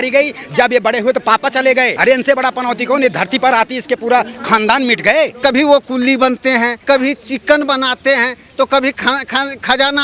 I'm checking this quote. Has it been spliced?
yes; 3 cuts; at 1.9 s, 5.4 s, 6.8 s

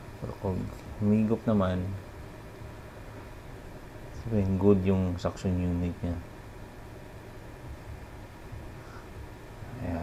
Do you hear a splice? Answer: no; 0 cuts

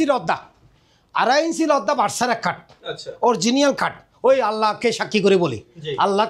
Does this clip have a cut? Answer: no; 0 cuts

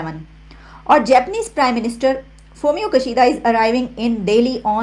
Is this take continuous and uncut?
yes; 0 cuts

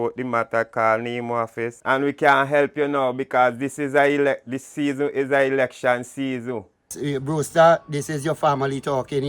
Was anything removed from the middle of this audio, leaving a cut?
yes; 2 cuts; at 1.7 s, 6.9 s

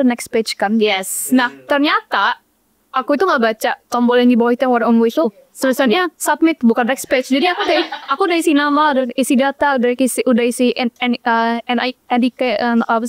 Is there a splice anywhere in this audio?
no; 0 cuts

